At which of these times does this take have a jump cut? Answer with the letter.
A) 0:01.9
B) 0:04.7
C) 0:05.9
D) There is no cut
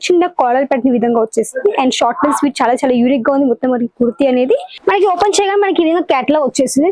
B